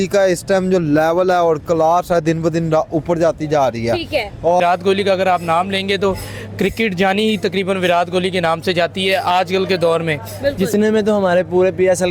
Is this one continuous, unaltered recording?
no; 2 cuts; at 4.6 s, 10.7 s

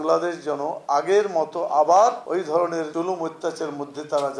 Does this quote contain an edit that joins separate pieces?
no; 0 cuts

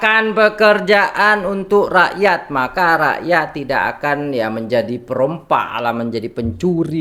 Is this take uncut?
yes; 0 cuts

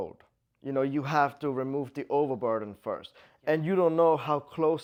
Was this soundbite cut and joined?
no; 0 cuts

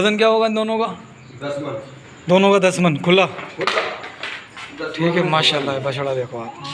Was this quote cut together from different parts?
no; 0 cuts

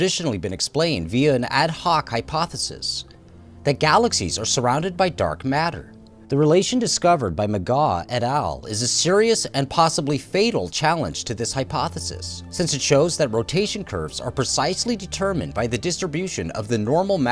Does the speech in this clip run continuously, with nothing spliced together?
yes; 0 cuts

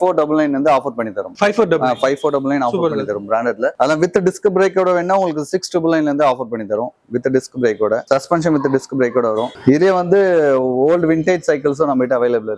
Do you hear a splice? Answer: no; 0 cuts

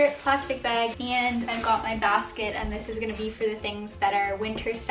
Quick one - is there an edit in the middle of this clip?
yes; 1 cut; at 0.9 s

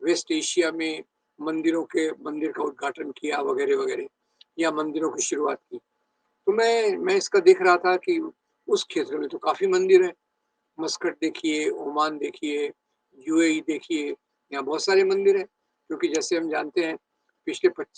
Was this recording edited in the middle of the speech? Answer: no; 0 cuts

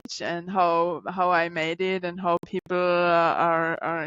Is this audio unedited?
yes; 0 cuts

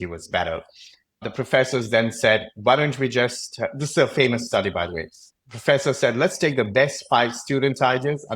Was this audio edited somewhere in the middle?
yes; 1 cut; at 1.2 s

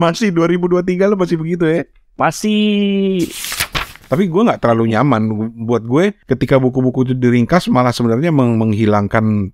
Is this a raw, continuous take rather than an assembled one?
no; 2 cuts; at 3.6 s, 6.2 s

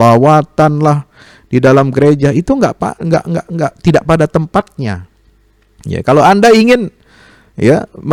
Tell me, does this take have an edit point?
no; 0 cuts

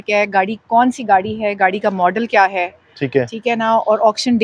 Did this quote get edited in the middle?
no; 0 cuts

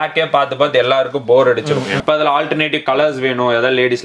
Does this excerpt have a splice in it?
yes; 1 cut; at 2.0 s

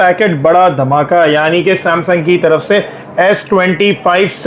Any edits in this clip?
no; 0 cuts

